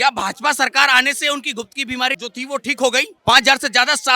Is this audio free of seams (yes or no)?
no